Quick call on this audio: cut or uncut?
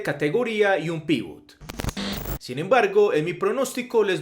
cut